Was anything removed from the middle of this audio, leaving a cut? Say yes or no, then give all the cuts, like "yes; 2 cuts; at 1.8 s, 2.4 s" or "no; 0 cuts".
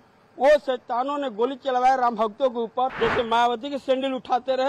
yes; 1 cut; at 2.9 s